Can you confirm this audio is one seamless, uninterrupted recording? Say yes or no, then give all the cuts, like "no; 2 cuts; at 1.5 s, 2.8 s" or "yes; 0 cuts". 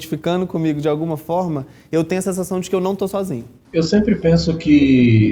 no; 1 cut; at 3.5 s